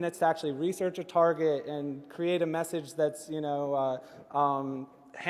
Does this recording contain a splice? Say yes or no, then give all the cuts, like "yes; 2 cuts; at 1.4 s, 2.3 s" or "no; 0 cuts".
no; 0 cuts